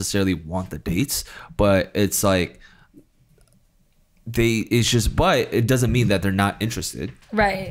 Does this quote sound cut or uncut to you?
uncut